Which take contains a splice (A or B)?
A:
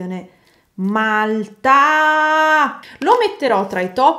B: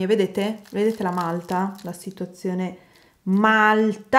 A